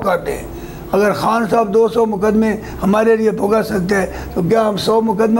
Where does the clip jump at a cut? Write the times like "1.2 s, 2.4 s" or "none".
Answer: none